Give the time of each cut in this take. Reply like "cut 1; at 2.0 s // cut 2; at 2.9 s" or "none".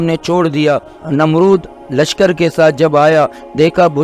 cut 1; at 0.9 s